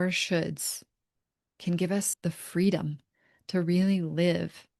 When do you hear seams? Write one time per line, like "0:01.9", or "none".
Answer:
0:02.1

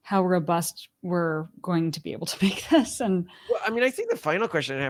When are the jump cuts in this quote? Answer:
none

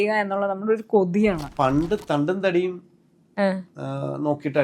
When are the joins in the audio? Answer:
0:01.5

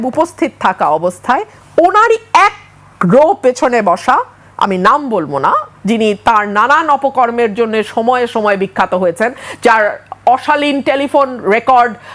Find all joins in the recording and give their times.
none

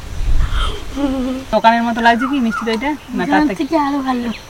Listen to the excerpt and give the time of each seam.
0:01.4

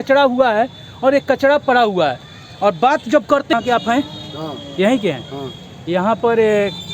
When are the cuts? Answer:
0:03.5

